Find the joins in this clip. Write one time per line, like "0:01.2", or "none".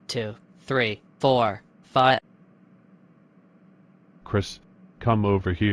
0:02.3
0:04.2